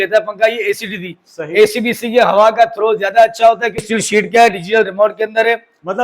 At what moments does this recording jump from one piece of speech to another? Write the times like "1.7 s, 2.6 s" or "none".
3.8 s